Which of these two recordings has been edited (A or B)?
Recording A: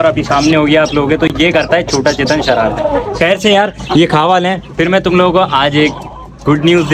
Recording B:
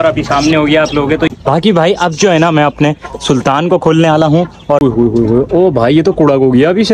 B